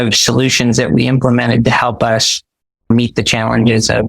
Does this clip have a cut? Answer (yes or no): yes